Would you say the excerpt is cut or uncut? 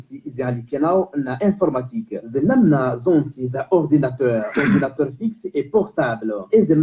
cut